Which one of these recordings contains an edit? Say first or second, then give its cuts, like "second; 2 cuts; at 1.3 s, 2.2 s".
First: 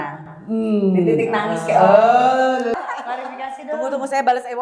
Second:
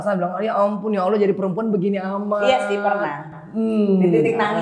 first; 1 cut; at 2.7 s